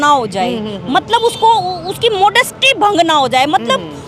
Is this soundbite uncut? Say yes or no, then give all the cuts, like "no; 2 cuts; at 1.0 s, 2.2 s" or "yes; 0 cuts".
yes; 0 cuts